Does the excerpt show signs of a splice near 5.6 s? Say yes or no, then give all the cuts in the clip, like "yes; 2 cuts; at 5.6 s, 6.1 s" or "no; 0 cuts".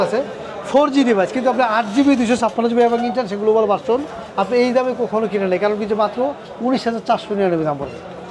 no; 0 cuts